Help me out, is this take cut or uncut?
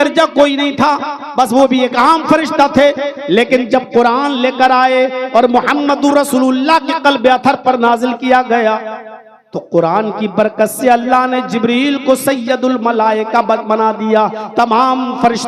uncut